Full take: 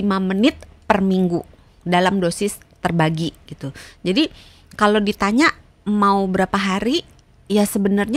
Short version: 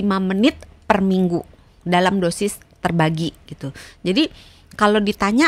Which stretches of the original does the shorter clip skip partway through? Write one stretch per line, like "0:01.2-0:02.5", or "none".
none